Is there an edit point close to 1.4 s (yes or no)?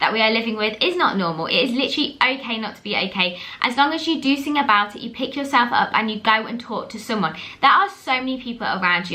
no